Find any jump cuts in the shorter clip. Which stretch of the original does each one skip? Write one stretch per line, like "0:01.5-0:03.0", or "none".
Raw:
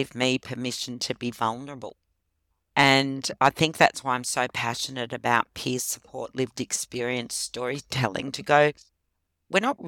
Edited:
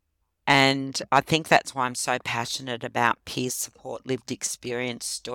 none